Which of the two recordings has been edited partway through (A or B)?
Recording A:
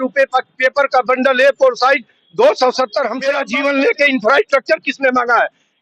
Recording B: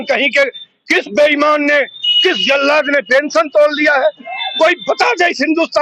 A